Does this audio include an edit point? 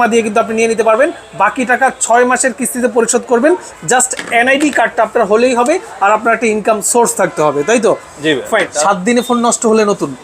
yes; 1 cut; at 8.7 s

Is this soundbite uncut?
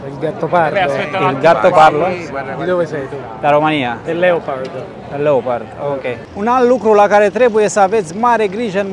no; 2 cuts; at 4.0 s, 6.2 s

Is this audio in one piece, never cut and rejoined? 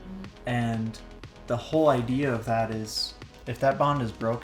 yes; 0 cuts

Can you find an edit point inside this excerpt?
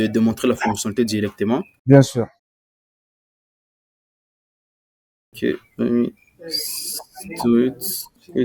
no; 0 cuts

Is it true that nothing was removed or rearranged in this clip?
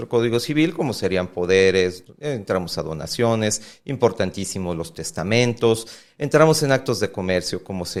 yes; 0 cuts

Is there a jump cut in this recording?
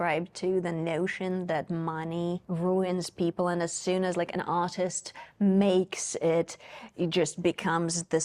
no; 0 cuts

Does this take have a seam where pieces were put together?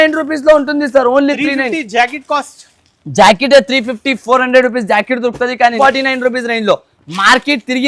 yes; 1 cut; at 5.8 s

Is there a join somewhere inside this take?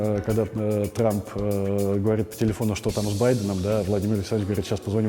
no; 0 cuts

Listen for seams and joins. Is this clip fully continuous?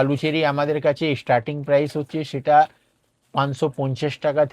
yes; 0 cuts

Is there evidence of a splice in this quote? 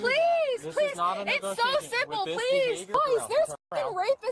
yes; 1 cut; at 2.9 s

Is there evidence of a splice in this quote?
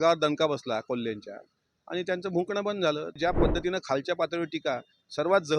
yes; 1 cut; at 3.2 s

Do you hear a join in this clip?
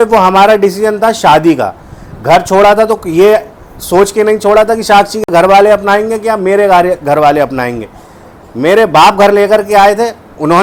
no; 0 cuts

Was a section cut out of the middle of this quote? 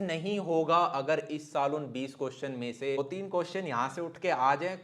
yes; 1 cut; at 3.0 s

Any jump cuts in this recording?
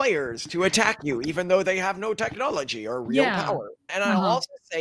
yes; 1 cut; at 3.8 s

